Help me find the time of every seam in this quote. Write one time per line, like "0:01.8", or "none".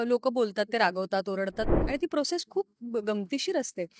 0:01.7